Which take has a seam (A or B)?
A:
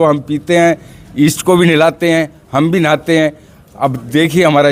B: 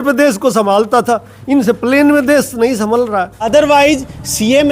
B